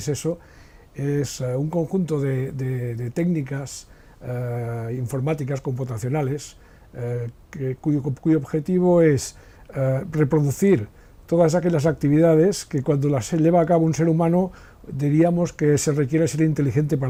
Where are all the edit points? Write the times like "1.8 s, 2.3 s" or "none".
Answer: none